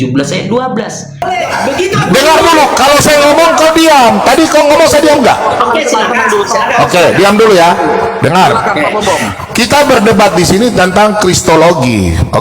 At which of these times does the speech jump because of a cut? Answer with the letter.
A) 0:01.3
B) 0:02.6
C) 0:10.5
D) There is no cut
A